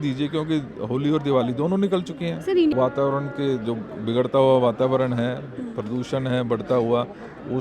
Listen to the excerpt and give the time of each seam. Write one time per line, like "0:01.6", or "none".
0:02.7